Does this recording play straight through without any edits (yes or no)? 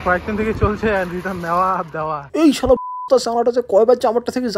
yes